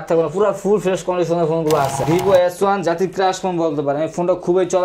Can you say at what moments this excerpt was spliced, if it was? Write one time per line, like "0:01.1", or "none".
0:02.0